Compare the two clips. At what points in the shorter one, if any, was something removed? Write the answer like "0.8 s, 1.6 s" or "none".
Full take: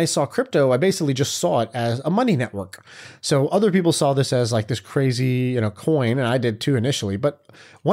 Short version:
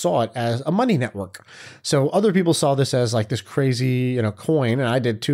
none